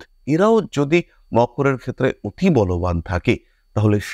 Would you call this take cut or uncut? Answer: uncut